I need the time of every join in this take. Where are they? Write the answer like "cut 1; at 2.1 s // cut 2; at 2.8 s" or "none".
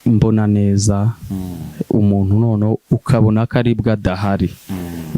none